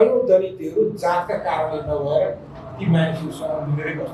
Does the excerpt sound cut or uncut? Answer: uncut